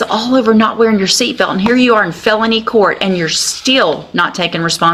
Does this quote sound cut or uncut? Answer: uncut